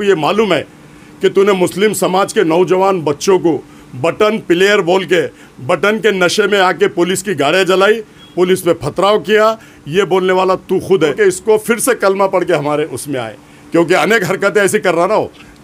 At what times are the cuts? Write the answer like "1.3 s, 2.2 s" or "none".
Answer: 11.1 s